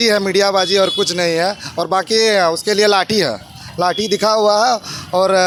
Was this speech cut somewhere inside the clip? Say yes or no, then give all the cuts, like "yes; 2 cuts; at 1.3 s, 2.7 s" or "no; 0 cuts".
no; 0 cuts